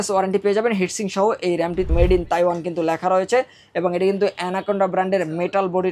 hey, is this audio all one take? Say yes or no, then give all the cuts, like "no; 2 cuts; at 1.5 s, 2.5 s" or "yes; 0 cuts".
no; 1 cut; at 1.9 s